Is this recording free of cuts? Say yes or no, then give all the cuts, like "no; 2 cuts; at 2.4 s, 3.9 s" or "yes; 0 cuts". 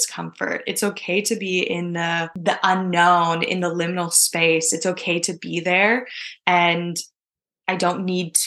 no; 1 cut; at 2.3 s